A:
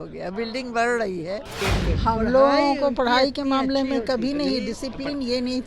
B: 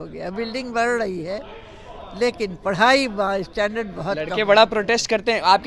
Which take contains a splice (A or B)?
A